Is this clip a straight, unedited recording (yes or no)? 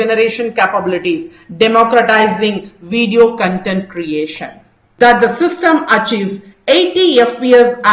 no